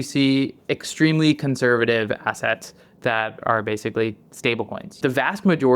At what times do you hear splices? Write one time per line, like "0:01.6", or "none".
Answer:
0:04.8